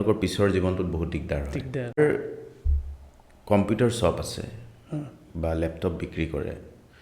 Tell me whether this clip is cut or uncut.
cut